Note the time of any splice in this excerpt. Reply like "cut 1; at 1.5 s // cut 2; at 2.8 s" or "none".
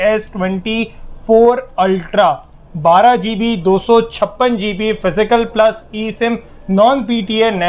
none